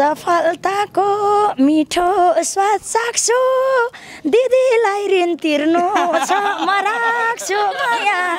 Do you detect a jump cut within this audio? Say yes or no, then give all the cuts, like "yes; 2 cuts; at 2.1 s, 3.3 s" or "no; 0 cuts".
no; 0 cuts